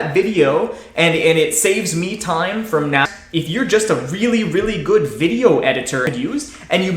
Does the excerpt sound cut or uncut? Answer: cut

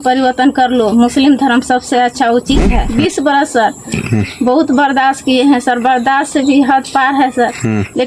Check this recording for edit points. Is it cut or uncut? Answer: cut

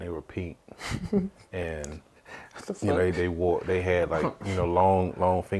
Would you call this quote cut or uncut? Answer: uncut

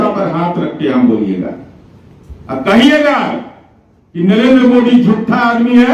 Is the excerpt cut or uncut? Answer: uncut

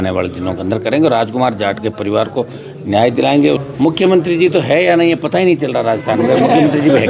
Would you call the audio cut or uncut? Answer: cut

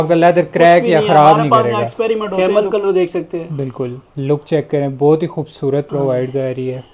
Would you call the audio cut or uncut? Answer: cut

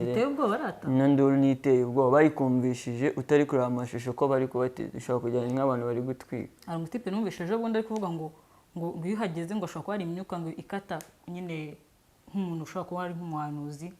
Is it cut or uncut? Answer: cut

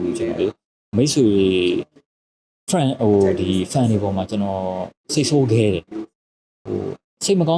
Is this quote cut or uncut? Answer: uncut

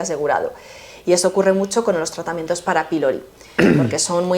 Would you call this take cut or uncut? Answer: uncut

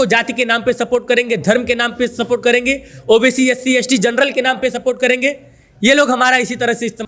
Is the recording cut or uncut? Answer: uncut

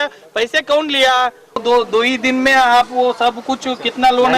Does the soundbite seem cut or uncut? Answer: cut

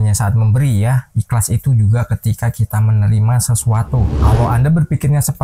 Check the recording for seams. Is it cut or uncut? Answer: cut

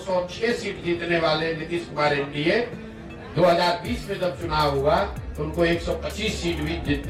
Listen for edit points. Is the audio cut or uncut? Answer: uncut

